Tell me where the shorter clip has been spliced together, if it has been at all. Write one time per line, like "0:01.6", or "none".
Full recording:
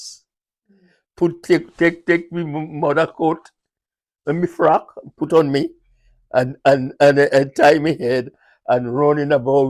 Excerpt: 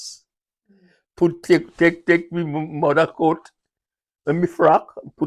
none